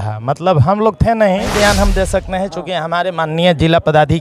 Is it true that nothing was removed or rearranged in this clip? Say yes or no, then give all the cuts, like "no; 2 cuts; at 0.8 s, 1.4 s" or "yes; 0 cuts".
no; 1 cut; at 1.5 s